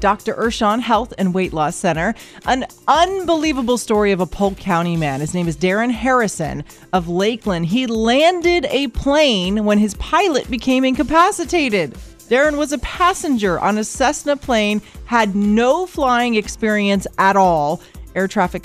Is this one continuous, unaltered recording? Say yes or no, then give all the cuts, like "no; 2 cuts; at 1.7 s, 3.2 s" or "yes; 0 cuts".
yes; 0 cuts